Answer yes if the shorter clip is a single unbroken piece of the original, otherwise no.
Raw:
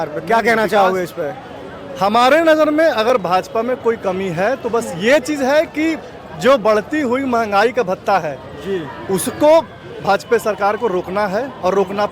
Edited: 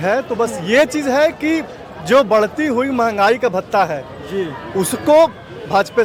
yes